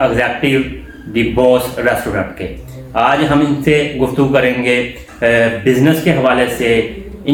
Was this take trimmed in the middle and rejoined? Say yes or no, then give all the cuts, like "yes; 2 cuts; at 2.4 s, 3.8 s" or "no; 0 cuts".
no; 0 cuts